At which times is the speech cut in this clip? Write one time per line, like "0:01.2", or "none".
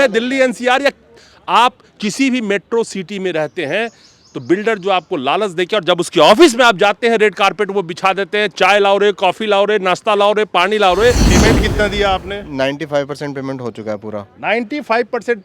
0:11.4

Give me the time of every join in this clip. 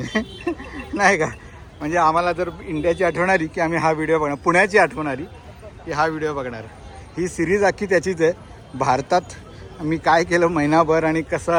none

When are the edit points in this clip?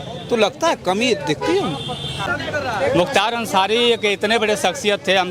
0:02.3

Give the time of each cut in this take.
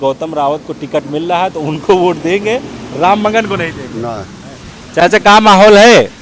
none

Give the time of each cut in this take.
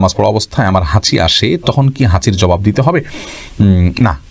none

